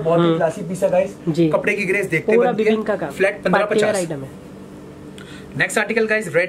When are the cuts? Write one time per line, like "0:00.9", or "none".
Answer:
none